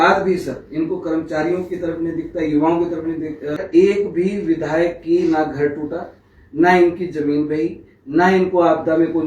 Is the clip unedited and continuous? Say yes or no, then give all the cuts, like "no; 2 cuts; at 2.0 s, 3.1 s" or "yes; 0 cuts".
no; 1 cut; at 3.6 s